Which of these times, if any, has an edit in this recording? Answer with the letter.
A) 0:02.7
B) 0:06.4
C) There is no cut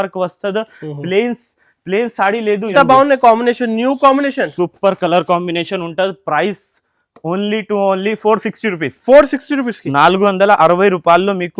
A